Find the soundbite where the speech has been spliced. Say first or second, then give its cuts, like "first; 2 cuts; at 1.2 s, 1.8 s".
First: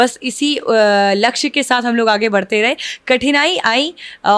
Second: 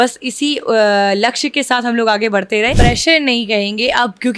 second; 1 cut; at 2.7 s